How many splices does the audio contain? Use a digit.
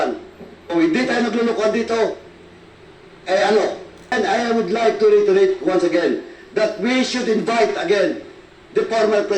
1